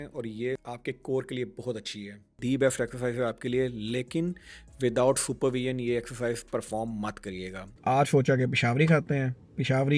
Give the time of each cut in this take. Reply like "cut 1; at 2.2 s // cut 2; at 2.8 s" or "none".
cut 1; at 2.4 s // cut 2; at 7.6 s